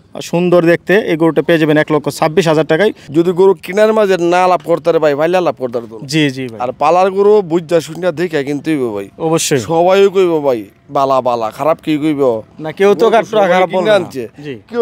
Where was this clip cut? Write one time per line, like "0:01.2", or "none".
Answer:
0:03.0